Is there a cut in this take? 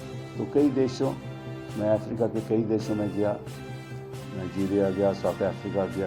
no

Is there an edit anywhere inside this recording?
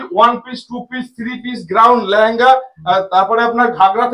no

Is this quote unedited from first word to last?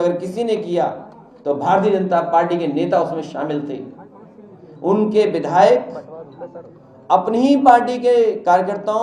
yes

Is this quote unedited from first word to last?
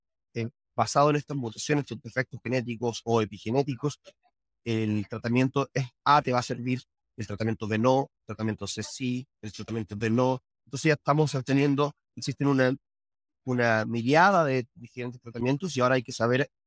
no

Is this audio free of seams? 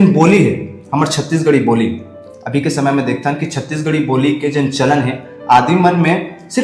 yes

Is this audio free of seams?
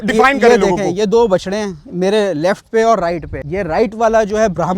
no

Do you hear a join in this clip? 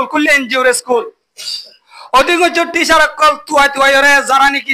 no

